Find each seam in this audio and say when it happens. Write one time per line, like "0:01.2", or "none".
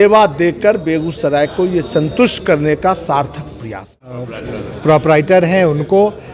0:04.2